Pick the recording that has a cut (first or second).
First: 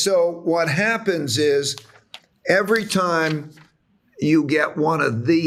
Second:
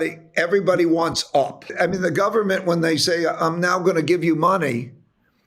second